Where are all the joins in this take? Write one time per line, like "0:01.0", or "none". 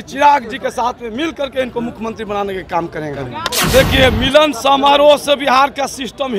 0:03.5